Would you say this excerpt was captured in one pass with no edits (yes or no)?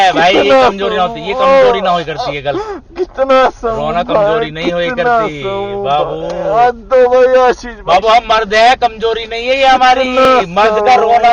yes